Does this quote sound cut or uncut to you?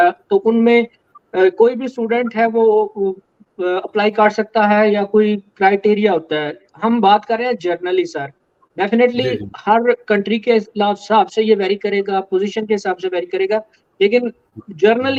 uncut